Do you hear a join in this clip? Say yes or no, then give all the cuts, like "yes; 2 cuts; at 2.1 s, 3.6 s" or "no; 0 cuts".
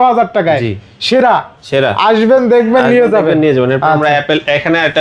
no; 0 cuts